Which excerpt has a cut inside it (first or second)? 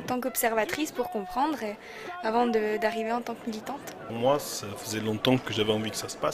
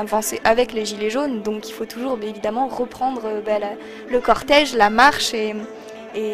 first